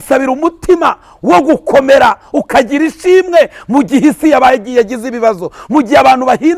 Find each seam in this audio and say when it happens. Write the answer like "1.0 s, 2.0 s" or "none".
none